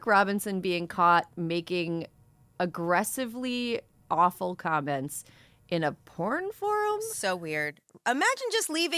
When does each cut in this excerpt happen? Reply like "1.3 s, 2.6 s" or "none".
none